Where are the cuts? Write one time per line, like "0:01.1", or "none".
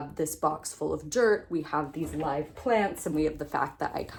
none